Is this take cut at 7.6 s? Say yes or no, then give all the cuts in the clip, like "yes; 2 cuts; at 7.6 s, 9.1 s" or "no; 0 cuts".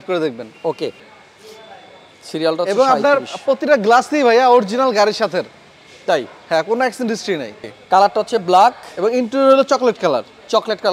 yes; 2 cuts; at 1.1 s, 7.6 s